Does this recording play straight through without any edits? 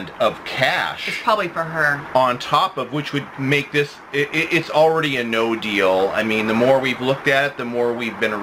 yes; 0 cuts

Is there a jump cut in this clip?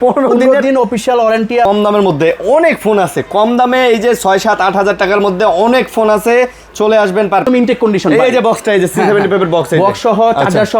yes; 2 cuts; at 1.7 s, 7.4 s

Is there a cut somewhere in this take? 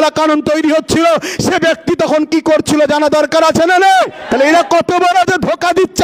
yes; 1 cut; at 4.2 s

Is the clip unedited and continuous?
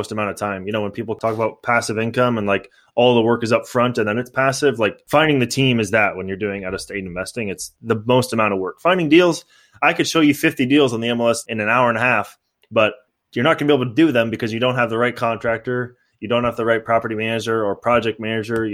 no; 3 cuts; at 1.2 s, 5.0 s, 11.5 s

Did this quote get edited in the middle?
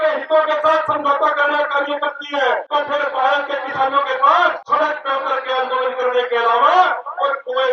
yes; 2 cuts; at 2.6 s, 4.6 s

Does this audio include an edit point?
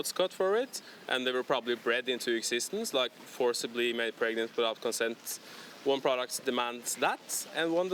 no; 0 cuts

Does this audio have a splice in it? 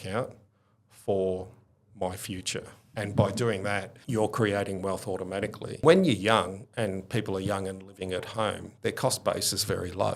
yes; 3 cuts; at 2.9 s, 4.0 s, 5.8 s

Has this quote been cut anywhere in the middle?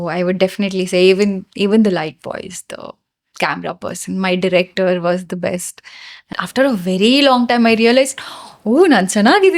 yes; 1 cut; at 6.3 s

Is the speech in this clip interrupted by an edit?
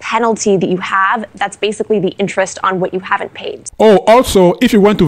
yes; 1 cut; at 3.6 s

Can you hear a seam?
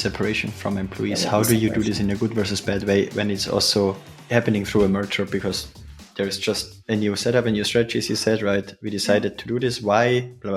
yes; 1 cut; at 4.1 s

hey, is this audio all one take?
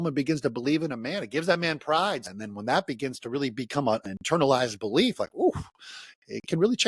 no; 2 cuts; at 2.2 s, 4.0 s

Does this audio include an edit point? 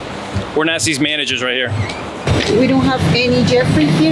yes; 1 cut; at 2.2 s

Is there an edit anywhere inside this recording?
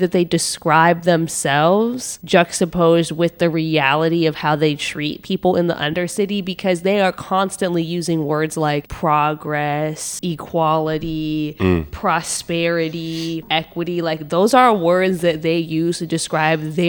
no; 0 cuts

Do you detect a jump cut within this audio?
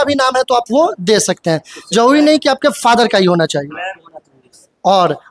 no; 0 cuts

